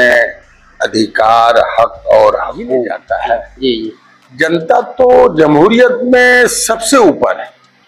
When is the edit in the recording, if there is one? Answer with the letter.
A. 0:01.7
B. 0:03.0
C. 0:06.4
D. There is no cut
B